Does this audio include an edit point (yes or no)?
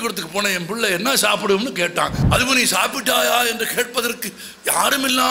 yes